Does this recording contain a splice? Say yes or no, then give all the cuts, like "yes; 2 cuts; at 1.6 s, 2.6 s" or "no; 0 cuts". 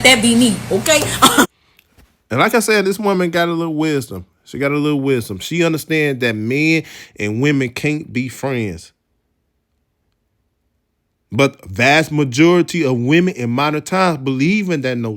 no; 0 cuts